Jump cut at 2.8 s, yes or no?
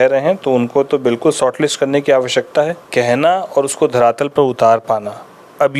yes